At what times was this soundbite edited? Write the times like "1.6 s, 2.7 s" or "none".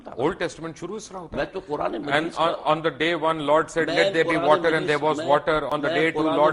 none